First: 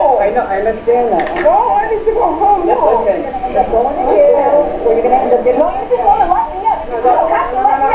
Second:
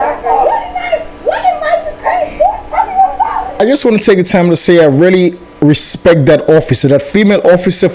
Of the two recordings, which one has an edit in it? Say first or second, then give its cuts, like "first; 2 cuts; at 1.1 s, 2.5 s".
second; 1 cut; at 3.6 s